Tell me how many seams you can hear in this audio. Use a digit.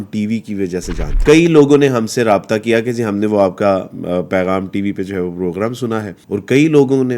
2